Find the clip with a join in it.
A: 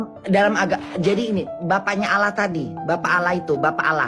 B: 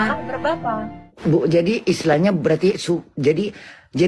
B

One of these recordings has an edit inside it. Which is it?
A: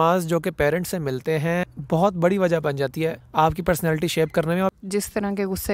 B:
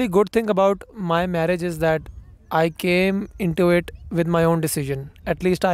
A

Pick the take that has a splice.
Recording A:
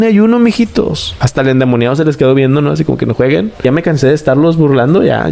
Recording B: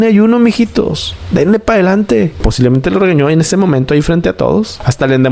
A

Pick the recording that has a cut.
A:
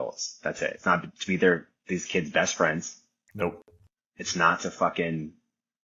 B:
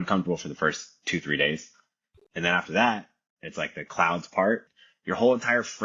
B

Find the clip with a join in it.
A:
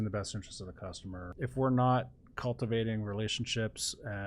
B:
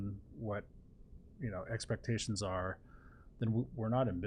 A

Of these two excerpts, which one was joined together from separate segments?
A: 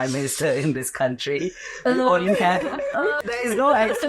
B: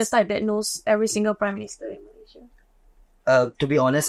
A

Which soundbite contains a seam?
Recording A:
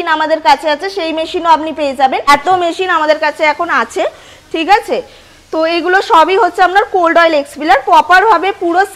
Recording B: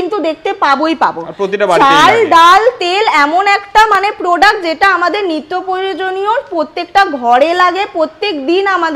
A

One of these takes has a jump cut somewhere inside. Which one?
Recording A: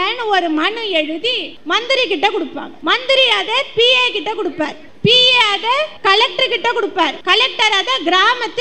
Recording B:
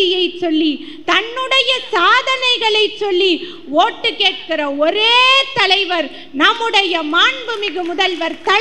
A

